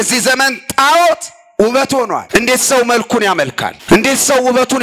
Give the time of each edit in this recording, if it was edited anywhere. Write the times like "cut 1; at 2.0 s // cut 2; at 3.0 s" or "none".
cut 1; at 2.2 s // cut 2; at 3.7 s